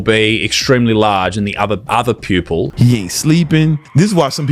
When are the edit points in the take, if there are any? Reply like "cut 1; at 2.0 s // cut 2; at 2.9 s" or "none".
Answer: cut 1; at 2.7 s